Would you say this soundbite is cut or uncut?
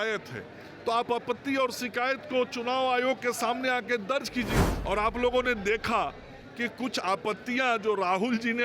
cut